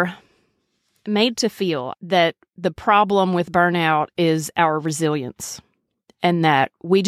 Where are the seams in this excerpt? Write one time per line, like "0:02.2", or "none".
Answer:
0:01.9